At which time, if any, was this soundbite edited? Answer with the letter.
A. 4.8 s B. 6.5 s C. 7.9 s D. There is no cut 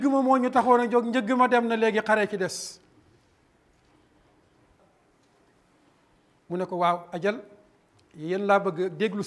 A